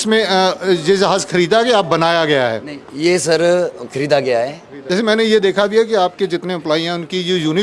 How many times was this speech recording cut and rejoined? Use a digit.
1